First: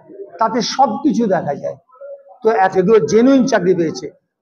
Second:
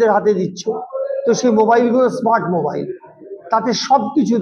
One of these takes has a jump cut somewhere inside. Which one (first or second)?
first